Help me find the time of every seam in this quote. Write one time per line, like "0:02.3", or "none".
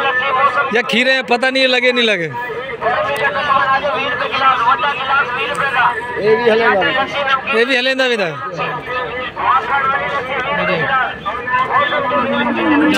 none